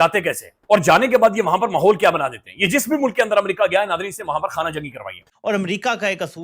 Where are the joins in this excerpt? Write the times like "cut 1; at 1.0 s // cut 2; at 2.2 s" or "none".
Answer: cut 1; at 5.2 s